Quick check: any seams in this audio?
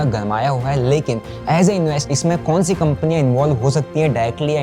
yes; 1 cut; at 2.1 s

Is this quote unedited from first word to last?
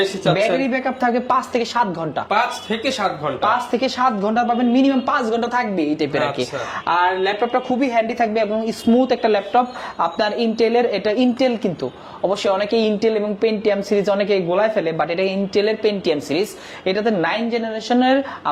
yes; 0 cuts

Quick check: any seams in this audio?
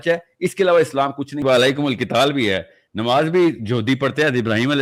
yes; 1 cut; at 1.4 s

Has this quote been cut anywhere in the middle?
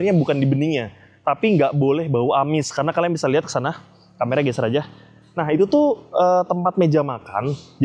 no; 0 cuts

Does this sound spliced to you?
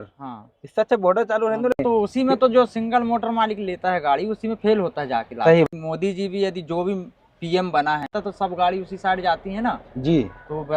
yes; 3 cuts; at 1.8 s, 5.7 s, 8.1 s

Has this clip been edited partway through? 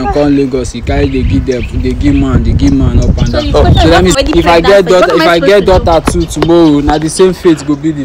yes; 1 cut; at 4.2 s

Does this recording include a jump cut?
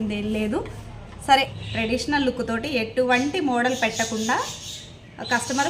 yes; 1 cut; at 1.5 s

